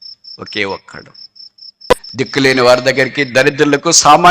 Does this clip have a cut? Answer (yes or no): yes